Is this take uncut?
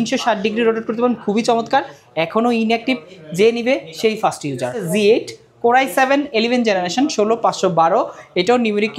no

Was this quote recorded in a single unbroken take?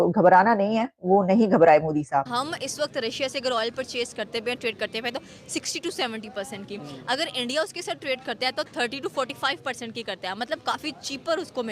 no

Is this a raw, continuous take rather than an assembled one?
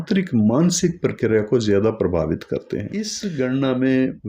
no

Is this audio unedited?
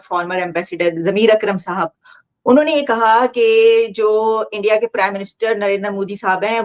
yes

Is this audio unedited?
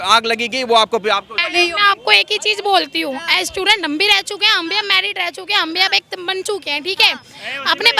no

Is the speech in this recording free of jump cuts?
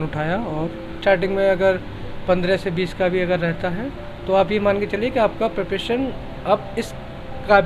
no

